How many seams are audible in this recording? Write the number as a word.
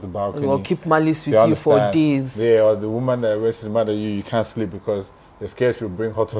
zero